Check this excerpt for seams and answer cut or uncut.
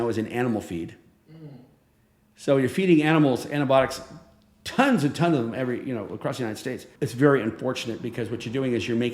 cut